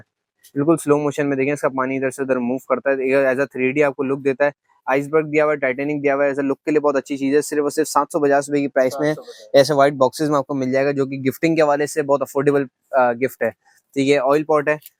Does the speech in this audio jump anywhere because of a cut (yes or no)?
no